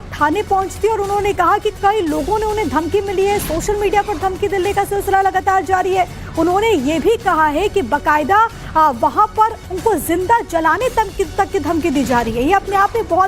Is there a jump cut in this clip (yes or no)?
yes